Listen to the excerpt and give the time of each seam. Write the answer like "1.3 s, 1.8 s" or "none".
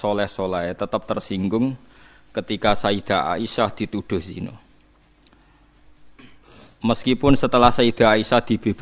none